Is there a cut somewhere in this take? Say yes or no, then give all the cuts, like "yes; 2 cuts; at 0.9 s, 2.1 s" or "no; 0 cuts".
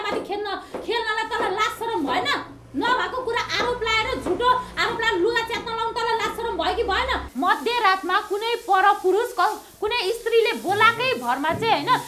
yes; 1 cut; at 7.3 s